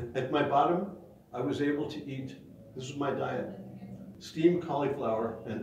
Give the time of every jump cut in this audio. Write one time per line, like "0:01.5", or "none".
0:04.2